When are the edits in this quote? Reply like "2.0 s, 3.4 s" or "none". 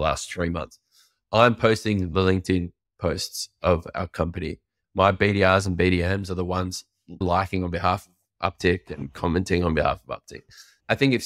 7.2 s